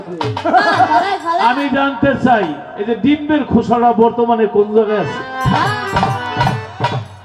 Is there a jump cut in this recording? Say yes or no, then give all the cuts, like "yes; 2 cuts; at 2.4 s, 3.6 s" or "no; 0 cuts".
yes; 1 cut; at 1.0 s